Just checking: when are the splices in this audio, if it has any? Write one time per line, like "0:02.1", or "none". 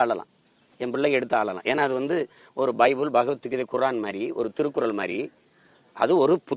none